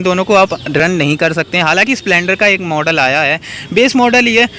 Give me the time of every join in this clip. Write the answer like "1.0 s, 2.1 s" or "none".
none